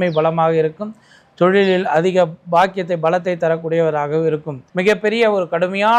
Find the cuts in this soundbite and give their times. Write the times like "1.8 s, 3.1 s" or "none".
4.6 s